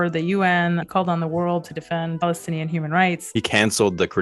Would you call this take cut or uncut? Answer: cut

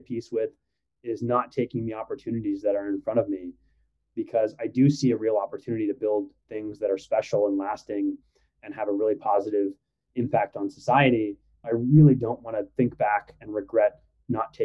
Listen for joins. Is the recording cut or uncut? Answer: cut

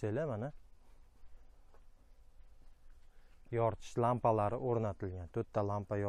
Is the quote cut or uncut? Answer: uncut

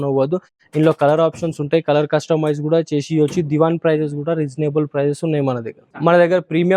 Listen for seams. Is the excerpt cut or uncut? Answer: uncut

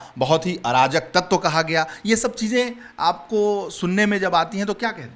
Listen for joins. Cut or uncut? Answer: uncut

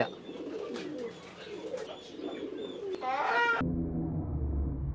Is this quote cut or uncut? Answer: cut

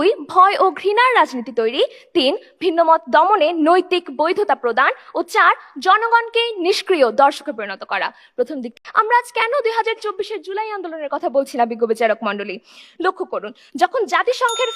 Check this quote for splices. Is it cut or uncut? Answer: cut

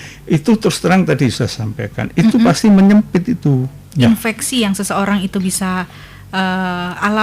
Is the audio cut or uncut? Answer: cut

